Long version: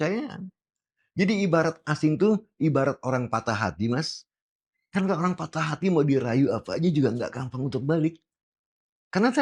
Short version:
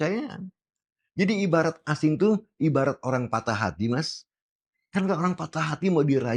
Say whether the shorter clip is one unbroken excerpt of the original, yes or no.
yes